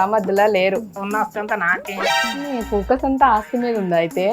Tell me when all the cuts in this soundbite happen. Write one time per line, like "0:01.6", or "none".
0:01.0
0:02.1

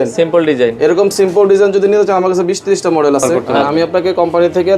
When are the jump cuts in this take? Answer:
0:03.5

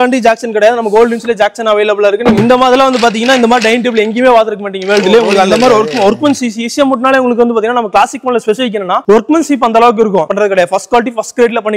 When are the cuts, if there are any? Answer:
0:02.4
0:10.2

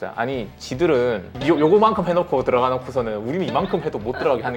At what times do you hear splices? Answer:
none

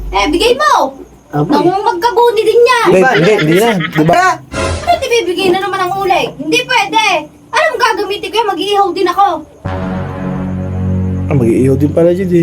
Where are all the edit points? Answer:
0:04.1

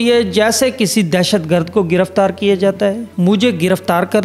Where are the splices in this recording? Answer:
0:03.1

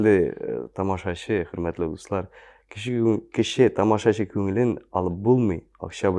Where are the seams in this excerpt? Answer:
none

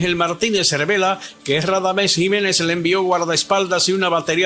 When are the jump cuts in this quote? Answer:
0:02.4

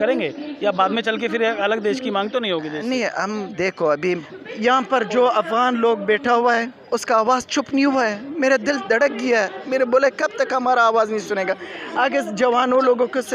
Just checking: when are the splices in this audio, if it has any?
0:04.2

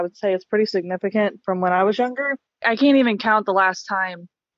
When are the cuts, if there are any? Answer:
0:02.5

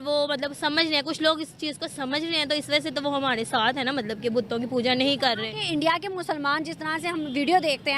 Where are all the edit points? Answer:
none

